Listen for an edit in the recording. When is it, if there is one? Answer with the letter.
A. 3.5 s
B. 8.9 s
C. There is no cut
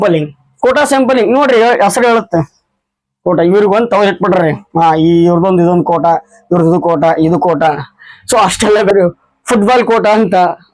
B